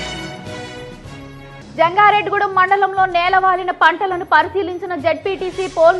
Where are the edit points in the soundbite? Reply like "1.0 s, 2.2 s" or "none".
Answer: 1.0 s